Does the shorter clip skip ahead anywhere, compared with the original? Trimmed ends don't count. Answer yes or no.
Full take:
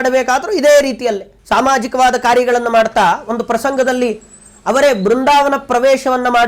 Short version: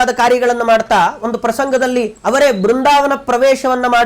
yes